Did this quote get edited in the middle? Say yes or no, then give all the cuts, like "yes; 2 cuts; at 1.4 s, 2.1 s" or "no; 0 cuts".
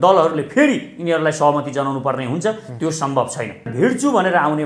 yes; 1 cut; at 3.7 s